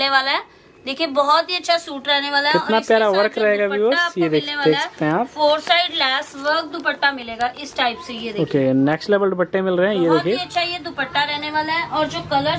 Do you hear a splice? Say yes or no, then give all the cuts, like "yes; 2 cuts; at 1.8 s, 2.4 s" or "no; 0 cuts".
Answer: no; 0 cuts